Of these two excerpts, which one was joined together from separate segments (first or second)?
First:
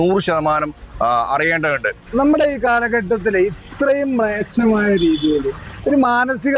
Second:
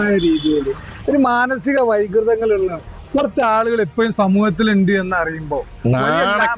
first